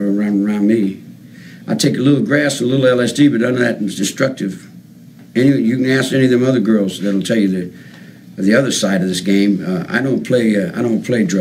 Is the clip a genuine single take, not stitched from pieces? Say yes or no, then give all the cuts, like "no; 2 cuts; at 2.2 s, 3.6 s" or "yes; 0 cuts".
yes; 0 cuts